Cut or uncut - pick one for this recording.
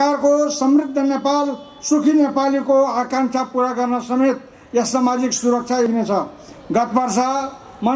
cut